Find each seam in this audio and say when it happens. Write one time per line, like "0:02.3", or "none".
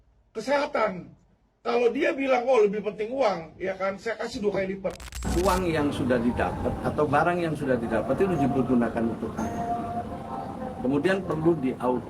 0:05.1